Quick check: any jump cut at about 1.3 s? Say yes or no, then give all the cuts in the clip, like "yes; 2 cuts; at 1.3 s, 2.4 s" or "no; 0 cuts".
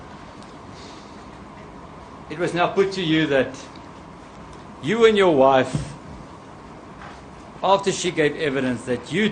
no; 1 cut; at 8.0 s